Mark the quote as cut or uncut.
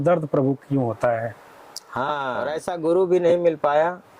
cut